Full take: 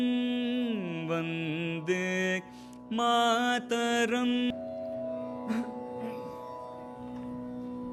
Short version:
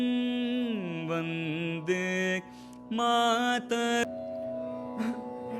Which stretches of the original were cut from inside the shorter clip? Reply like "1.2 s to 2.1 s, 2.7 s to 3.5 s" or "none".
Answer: 4.0 s to 4.5 s